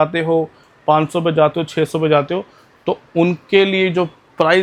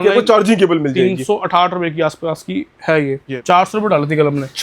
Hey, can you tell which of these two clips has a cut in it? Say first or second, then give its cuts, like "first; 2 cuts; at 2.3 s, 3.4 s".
second; 1 cut; at 3.2 s